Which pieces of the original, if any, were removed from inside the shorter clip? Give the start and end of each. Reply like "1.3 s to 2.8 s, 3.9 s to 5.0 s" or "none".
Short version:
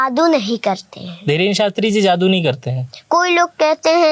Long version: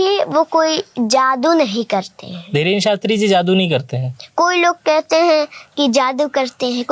none